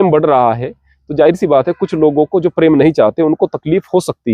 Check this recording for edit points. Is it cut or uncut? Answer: uncut